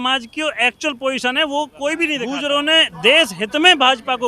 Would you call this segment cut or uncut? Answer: cut